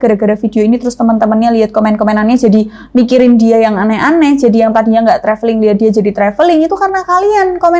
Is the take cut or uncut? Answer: uncut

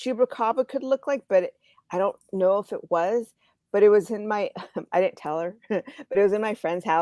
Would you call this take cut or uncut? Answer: uncut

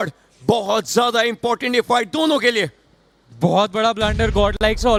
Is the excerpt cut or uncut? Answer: uncut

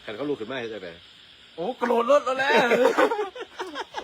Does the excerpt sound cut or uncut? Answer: uncut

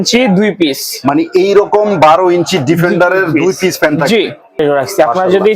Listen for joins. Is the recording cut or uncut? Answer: cut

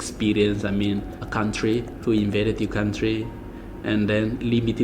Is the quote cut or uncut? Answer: cut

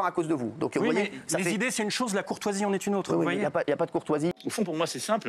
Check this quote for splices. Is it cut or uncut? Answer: cut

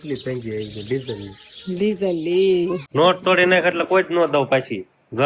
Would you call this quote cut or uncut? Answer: cut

